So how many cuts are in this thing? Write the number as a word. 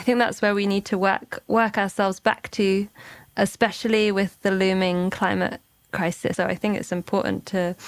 one